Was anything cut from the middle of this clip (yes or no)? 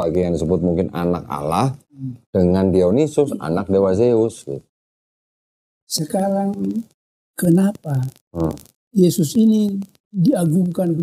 no